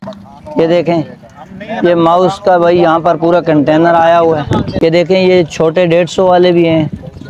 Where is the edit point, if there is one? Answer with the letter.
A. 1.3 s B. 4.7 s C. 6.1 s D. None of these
B